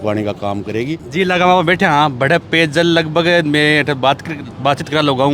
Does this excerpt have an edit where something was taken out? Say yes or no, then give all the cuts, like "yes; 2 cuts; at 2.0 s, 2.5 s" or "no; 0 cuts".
yes; 1 cut; at 1.0 s